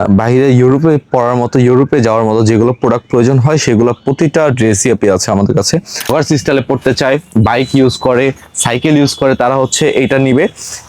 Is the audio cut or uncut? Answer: cut